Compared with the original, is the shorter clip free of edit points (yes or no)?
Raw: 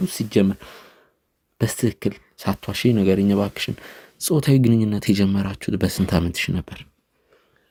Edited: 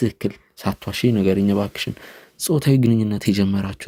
yes